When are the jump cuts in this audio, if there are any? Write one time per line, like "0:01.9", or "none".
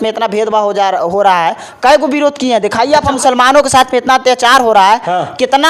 none